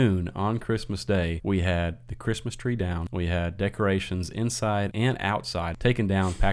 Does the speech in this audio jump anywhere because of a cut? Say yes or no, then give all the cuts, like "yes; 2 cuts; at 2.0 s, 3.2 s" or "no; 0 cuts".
yes; 3 cuts; at 1.4 s, 3.1 s, 5.1 s